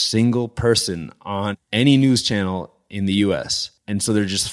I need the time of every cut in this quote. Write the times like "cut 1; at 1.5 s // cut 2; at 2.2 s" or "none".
cut 1; at 1.6 s